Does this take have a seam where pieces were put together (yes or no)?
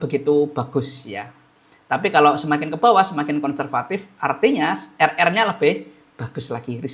no